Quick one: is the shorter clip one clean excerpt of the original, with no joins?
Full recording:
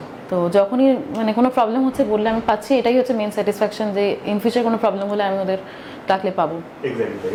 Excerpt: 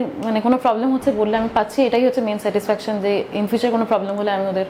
yes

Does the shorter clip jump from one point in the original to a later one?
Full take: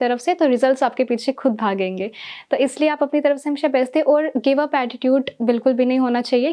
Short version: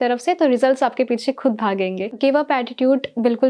yes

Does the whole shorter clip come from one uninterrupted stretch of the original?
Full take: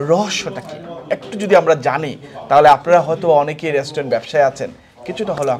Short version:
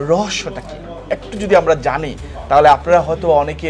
yes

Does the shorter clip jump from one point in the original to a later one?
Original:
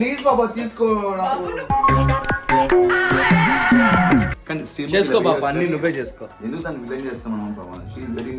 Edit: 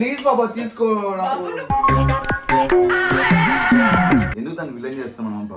yes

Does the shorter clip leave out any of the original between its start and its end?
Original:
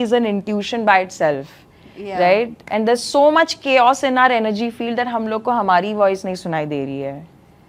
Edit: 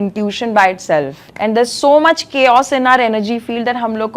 yes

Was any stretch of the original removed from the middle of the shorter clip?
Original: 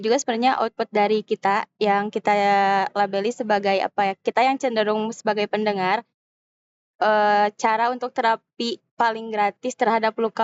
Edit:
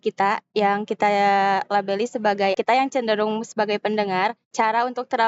yes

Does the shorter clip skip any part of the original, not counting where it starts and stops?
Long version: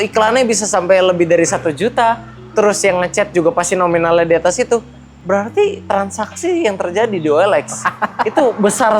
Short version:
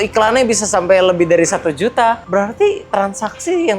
yes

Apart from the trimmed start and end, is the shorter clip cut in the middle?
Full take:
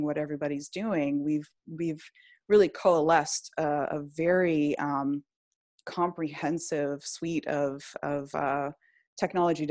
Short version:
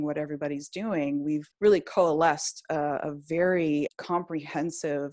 yes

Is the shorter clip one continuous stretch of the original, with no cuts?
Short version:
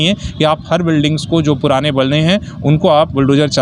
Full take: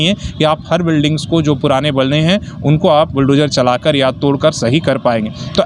yes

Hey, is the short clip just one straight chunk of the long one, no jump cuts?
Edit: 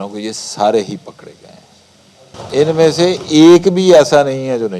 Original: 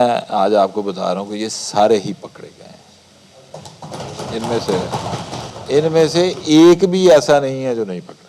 no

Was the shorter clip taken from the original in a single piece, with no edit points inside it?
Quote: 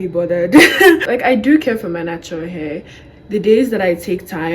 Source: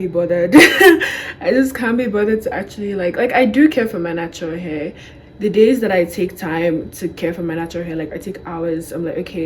no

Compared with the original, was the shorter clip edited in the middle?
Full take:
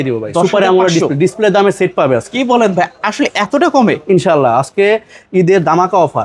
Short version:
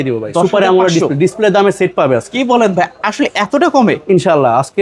no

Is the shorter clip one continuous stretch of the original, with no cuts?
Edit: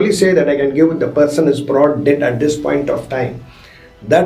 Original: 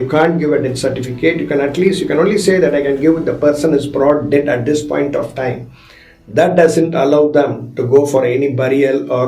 yes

